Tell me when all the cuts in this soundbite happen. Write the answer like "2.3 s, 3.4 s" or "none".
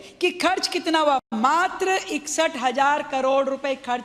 none